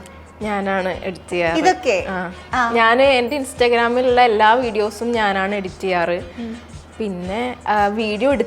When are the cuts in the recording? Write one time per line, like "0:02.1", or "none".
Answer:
none

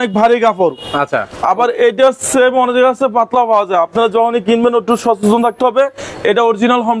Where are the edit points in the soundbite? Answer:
none

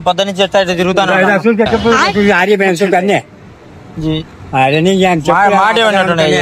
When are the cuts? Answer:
none

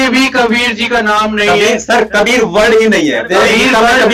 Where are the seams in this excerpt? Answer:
none

